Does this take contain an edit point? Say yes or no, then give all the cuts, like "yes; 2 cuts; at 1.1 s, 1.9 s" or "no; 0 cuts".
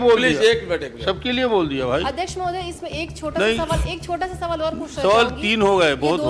no; 0 cuts